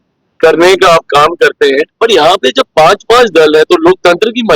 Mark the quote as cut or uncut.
cut